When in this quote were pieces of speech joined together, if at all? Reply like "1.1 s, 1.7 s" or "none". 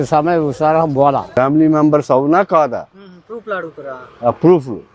1.3 s